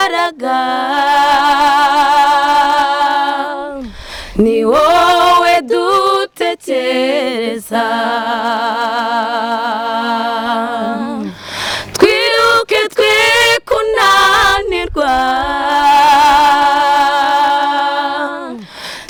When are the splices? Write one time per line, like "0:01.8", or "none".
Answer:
none